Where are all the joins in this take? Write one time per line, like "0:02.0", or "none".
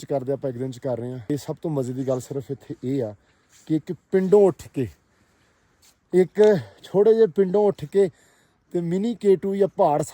0:01.3